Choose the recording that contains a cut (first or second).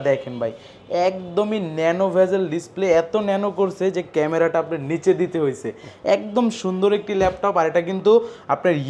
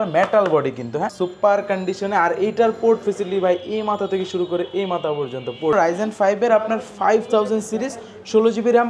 second